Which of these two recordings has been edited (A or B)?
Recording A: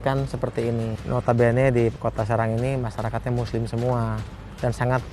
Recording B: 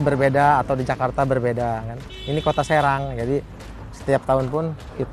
A